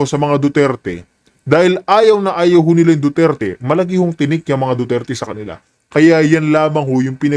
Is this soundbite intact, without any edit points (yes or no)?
yes